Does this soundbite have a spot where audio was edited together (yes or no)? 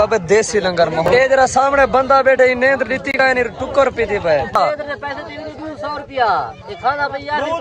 yes